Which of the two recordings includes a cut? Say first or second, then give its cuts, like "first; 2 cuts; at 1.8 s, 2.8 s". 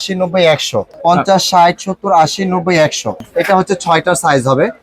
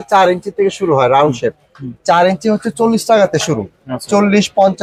first; 2 cuts; at 0.9 s, 3.2 s